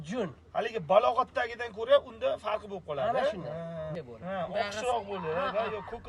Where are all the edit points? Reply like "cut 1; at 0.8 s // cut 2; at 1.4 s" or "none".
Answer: cut 1; at 3.9 s